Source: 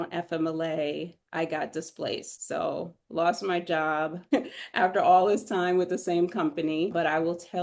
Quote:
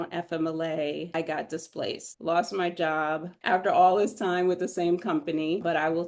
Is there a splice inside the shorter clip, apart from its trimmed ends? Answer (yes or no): yes